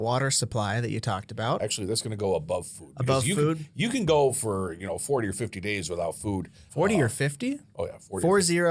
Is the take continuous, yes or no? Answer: no